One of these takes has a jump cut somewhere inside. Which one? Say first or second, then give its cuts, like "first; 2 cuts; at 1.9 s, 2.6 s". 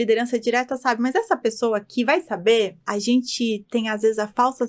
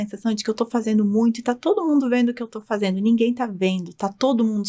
first; 1 cut; at 2.8 s